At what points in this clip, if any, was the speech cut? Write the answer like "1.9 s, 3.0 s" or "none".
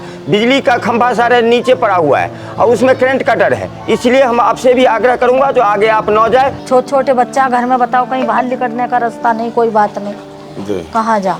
6.6 s